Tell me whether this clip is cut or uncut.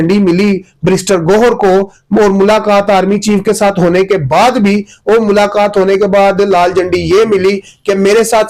uncut